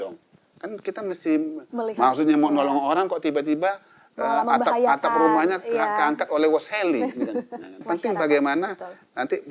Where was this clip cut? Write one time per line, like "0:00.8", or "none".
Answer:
0:07.8

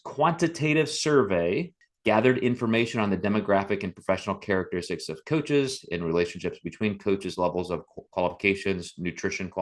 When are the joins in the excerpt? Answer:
0:01.8

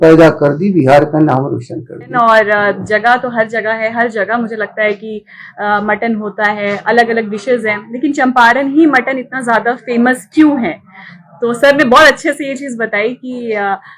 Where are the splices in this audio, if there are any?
0:02.1

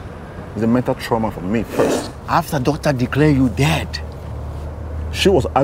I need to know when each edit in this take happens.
0:02.0

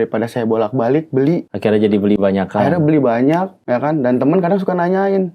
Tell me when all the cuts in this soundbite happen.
0:01.5
0:03.5

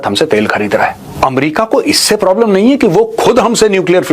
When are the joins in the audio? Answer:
0:01.1

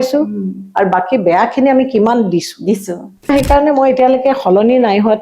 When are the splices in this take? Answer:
0:03.3

